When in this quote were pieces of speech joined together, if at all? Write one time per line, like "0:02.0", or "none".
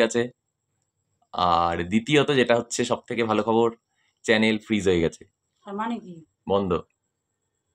none